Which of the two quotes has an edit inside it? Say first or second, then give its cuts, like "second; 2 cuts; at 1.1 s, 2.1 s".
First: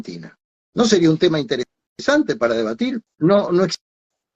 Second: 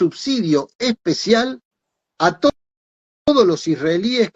first; 1 cut; at 3.0 s